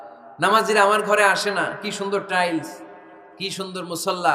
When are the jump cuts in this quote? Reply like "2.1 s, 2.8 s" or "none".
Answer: none